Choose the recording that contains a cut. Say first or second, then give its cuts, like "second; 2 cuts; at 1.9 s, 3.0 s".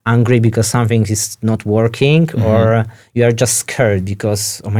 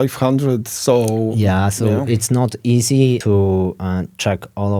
second; 1 cut; at 3.2 s